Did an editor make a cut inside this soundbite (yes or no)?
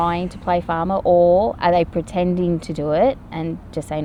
no